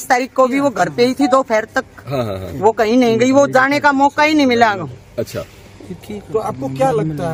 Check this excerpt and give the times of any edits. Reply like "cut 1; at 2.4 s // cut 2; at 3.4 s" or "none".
none